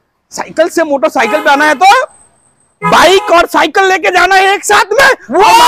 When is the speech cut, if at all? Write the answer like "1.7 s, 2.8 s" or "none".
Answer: none